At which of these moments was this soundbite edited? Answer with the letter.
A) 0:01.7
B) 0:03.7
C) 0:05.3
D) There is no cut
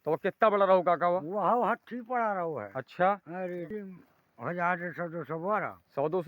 B